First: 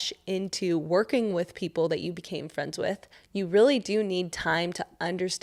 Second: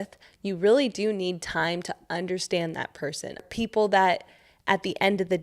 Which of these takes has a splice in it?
second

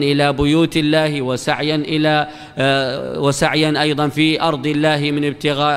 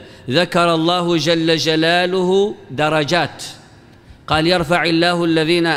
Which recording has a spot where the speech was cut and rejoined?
first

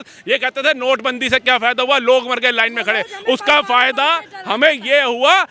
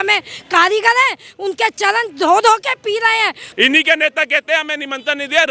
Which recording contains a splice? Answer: second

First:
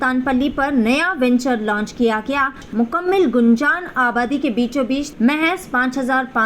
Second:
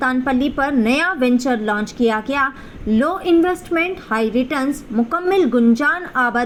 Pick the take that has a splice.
first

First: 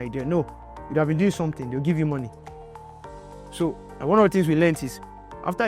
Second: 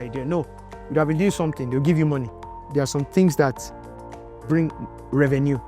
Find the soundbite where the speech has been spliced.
second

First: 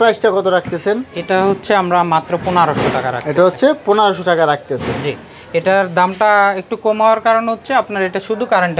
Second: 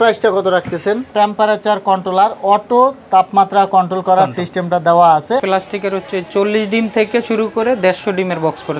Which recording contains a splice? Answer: second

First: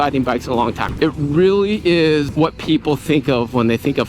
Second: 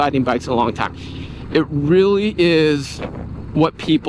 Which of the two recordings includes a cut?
first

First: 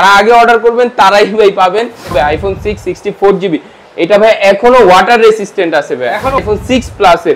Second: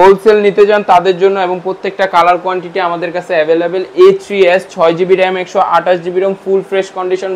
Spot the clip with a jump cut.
first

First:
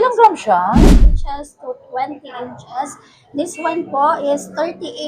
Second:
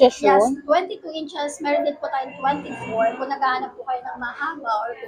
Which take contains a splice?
first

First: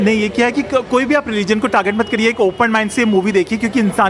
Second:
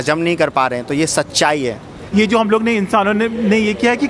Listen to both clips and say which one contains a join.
second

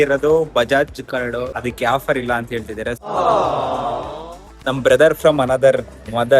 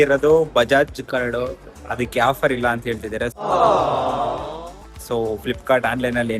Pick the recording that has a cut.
first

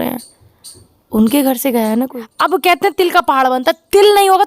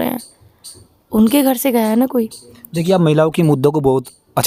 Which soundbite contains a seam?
first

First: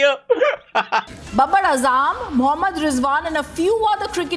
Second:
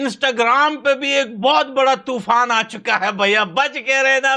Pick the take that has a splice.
first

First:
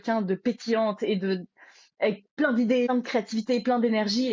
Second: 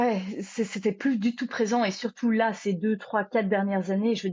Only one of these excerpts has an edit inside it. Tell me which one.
first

